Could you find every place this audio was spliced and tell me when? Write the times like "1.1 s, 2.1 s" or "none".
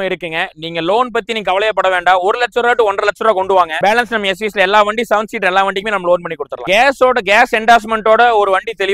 3.7 s, 6.5 s